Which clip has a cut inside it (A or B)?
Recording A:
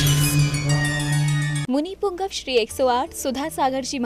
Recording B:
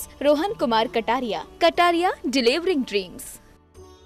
A